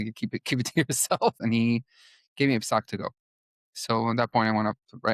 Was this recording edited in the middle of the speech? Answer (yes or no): yes